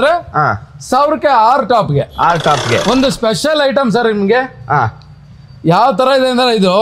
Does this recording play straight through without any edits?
no; 1 cut; at 2.8 s

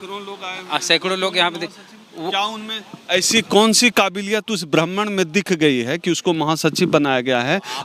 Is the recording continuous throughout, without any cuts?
yes; 0 cuts

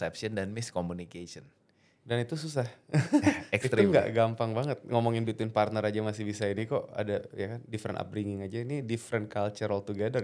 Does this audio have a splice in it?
no; 0 cuts

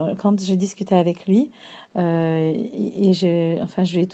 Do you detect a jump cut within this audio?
yes; 1 cut; at 3.2 s

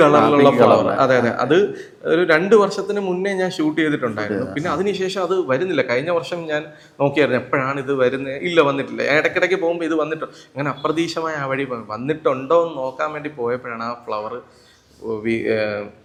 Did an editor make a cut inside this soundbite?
no; 0 cuts

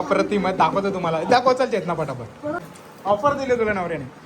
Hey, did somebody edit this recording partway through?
yes; 1 cut; at 2.7 s

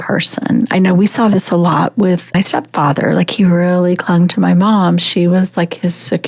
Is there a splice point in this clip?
yes; 1 cut; at 2.3 s

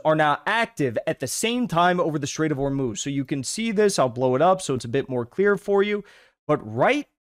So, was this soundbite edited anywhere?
no; 0 cuts

